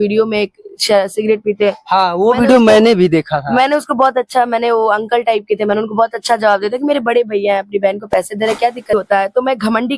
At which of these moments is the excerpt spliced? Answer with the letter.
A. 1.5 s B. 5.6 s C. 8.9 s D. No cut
C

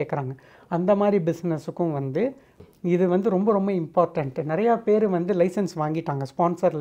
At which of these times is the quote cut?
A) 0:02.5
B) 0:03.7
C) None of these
A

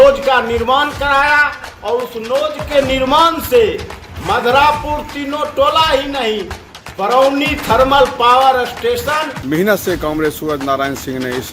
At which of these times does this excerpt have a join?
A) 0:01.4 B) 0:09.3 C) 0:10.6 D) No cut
B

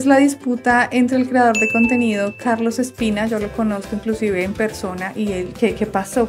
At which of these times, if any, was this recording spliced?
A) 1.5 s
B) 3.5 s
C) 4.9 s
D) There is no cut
D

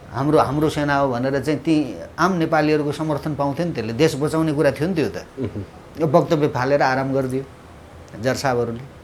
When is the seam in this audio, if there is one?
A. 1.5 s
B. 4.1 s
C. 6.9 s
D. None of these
D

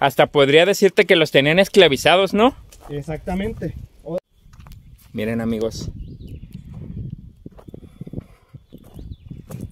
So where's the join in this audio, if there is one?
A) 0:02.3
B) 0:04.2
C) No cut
B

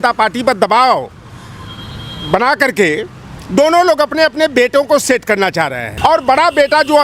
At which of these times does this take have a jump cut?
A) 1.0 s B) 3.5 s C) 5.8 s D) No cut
C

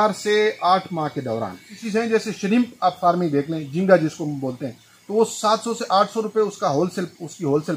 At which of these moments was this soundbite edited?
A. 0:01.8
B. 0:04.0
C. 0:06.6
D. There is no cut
A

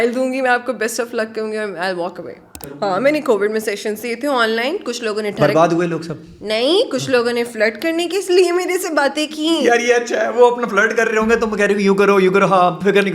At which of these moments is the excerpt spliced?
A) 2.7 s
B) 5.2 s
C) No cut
A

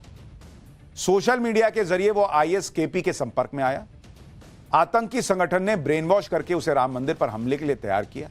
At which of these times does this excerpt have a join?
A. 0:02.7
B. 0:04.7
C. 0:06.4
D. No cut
C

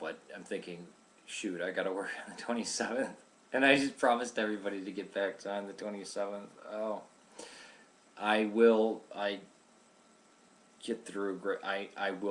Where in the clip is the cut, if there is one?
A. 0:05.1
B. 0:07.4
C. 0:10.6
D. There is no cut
A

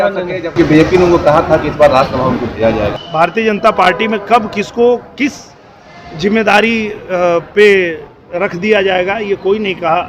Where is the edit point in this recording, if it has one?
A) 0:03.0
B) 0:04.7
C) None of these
A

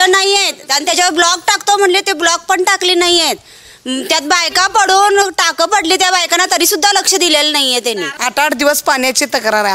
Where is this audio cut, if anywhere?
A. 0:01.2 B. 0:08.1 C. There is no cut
B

